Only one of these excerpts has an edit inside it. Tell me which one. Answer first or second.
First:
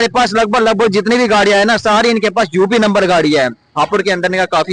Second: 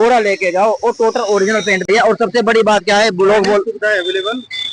second